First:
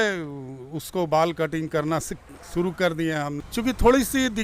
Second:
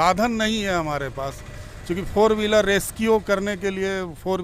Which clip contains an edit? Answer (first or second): first